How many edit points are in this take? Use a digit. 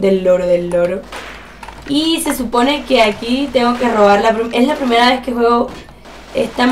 1